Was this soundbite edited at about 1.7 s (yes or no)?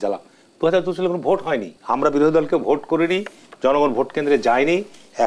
yes